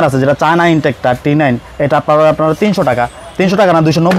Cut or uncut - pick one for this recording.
uncut